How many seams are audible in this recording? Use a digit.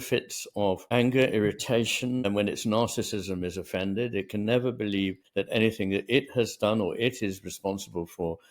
2